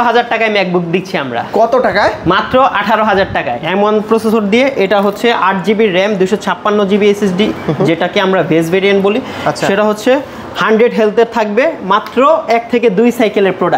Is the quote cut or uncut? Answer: cut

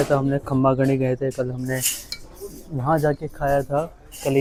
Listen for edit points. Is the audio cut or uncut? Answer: uncut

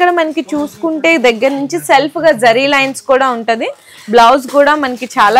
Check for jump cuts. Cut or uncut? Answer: uncut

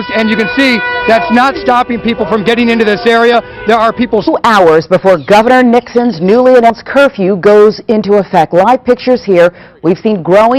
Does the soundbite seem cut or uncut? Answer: uncut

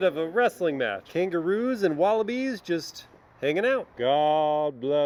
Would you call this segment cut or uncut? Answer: uncut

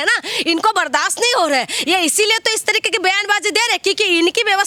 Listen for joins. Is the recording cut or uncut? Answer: uncut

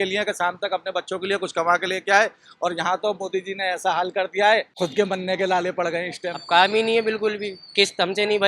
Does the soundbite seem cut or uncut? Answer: cut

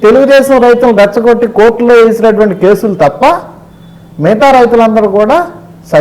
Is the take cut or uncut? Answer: uncut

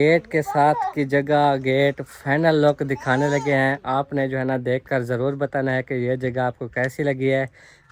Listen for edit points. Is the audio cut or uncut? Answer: uncut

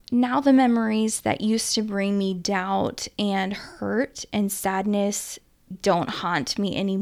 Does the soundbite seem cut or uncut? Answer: cut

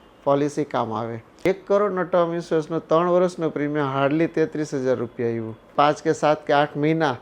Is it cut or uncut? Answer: cut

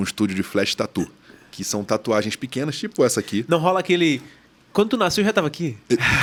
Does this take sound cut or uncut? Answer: uncut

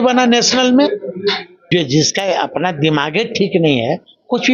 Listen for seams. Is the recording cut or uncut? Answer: cut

